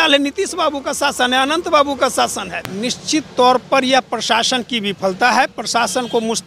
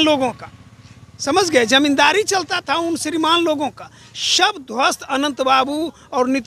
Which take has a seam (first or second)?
first